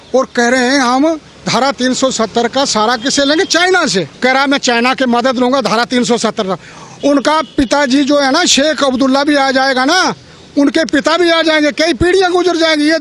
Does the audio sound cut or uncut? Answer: cut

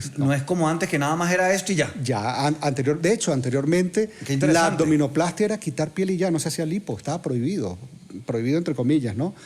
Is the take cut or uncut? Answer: uncut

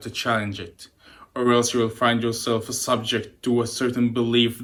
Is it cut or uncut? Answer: uncut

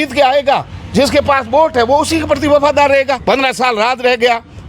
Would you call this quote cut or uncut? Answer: cut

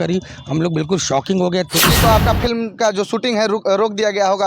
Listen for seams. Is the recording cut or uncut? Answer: cut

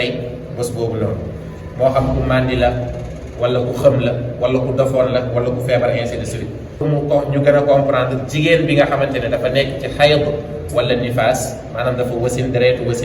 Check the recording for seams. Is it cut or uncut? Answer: cut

